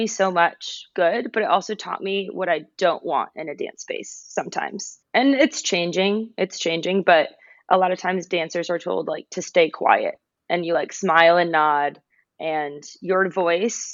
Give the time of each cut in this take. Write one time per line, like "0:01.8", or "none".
none